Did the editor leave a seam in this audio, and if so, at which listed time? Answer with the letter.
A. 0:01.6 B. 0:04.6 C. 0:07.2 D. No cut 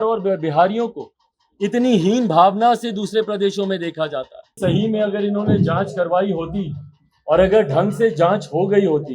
B